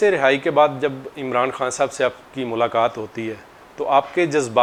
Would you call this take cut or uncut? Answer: uncut